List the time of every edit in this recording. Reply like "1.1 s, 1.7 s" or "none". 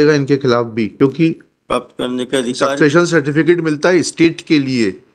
0.9 s